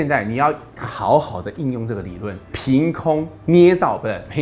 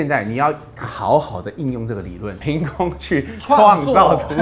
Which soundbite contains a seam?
second; 1 cut; at 2.3 s

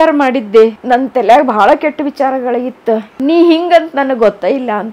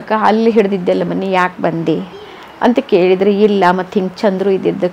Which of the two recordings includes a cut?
first; 2 cuts; at 0.8 s, 3.1 s

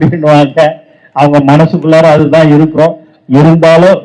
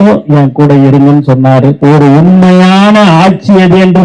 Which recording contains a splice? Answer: second; 1 cut; at 1.8 s

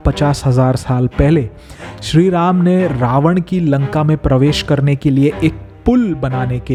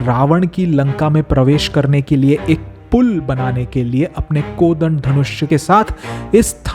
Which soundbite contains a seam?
second; 1 cut; at 5.5 s

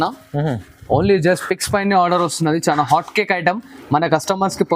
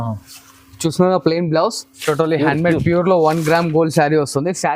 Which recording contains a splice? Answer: second; 1 cut; at 1.9 s

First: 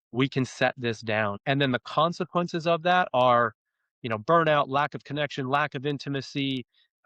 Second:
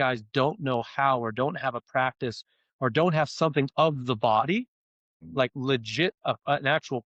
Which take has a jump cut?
first; 1 cut; at 1.4 s

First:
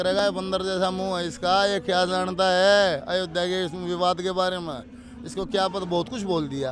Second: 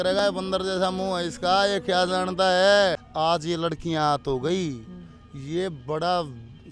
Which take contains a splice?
second; 1 cut; at 3.0 s

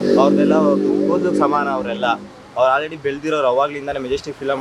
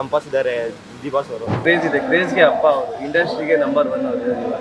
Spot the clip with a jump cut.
second; 1 cut; at 1.6 s

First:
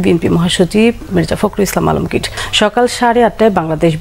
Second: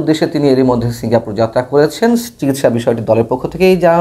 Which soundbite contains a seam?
first; 1 cut; at 2.4 s

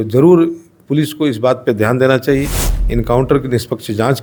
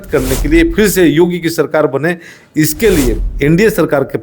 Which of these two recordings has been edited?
second; 1 cut; at 3.2 s

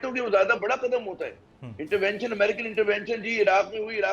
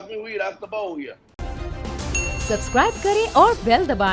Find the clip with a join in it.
second; 1 cut; at 1.5 s

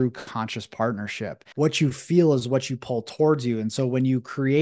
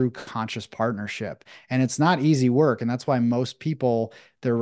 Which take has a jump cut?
first; 1 cut; at 1.4 s

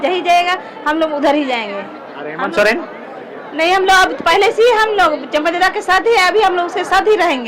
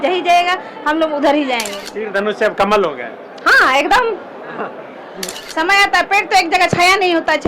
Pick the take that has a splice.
second; 2 cuts; at 1.8 s, 5.4 s

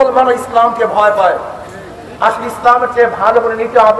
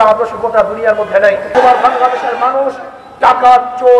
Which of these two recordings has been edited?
second; 1 cut; at 1.5 s

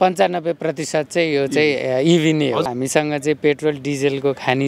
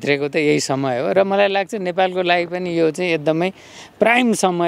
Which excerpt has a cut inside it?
first; 1 cut; at 2.7 s

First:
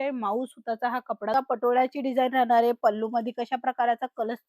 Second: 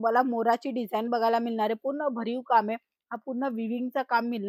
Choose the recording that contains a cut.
first; 1 cut; at 1.3 s

